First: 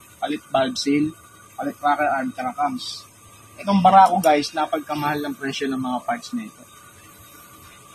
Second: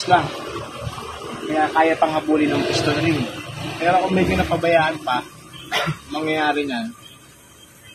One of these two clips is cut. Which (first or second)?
first